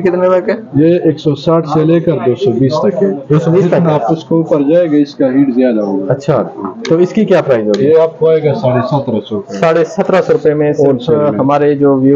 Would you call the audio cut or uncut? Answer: uncut